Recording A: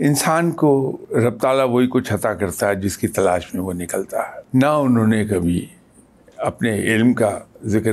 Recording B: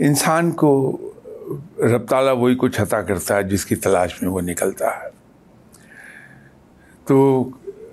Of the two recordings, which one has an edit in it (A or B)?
A